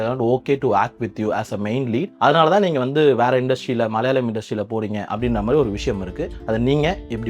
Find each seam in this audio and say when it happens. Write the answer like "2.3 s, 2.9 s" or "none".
2.1 s, 6.3 s